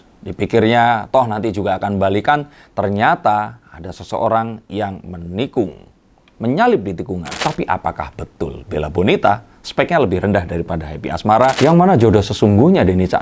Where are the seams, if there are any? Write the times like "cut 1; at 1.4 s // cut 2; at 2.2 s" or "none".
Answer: cut 1; at 7.4 s // cut 2; at 11.6 s